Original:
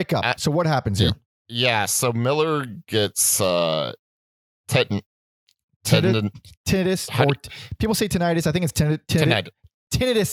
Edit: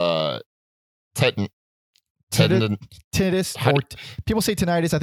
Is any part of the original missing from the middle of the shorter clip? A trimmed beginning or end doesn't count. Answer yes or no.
no